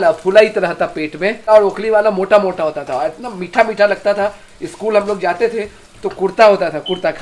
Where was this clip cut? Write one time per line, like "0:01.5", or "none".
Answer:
0:01.5